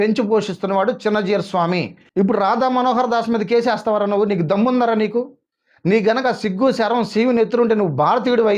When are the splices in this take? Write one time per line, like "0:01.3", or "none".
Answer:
0:02.0